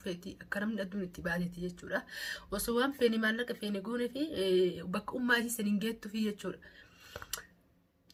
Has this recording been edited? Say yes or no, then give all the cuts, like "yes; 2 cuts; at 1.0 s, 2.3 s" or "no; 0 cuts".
no; 0 cuts